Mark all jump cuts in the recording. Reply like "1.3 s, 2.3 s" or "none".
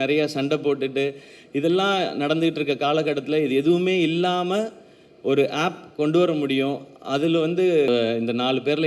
7.9 s